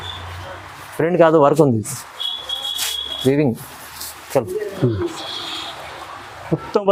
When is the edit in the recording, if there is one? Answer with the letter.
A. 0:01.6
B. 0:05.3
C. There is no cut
C